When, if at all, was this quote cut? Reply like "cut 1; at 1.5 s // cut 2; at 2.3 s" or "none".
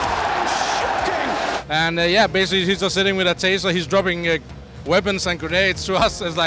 cut 1; at 1.6 s

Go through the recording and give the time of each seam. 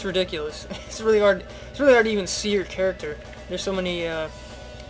cut 1; at 2.2 s

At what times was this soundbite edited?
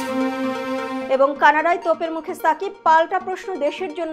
cut 1; at 1.0 s

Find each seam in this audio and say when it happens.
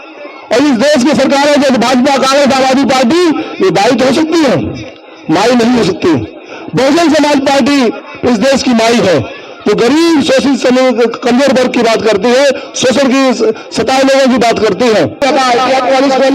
cut 1; at 15.2 s

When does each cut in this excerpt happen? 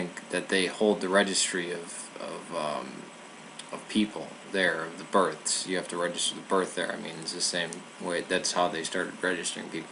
cut 1; at 8.8 s

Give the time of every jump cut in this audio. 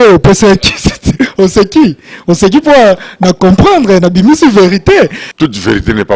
cut 1; at 5.2 s

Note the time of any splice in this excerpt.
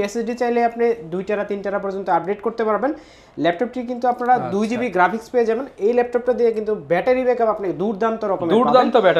none

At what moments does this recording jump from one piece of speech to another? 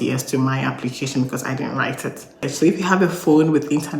cut 1; at 2.4 s

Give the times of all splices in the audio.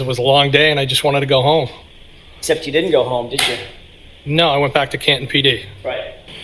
none

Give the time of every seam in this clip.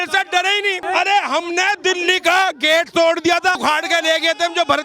cut 1; at 0.8 s // cut 2; at 3.6 s

